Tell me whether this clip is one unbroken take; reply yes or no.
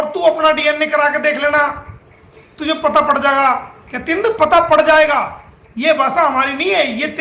yes